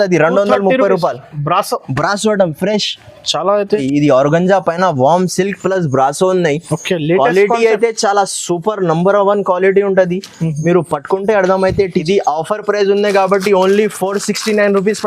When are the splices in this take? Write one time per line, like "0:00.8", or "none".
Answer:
0:03.8
0:12.0